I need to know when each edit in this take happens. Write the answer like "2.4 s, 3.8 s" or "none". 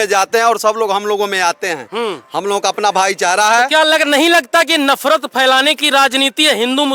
none